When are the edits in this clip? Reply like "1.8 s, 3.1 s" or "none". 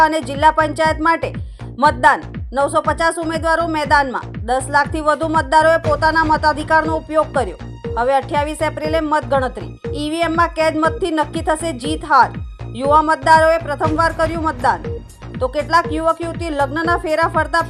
none